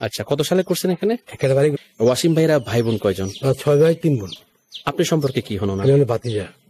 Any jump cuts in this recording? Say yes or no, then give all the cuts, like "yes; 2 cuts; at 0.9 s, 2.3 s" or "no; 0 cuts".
yes; 1 cut; at 1.8 s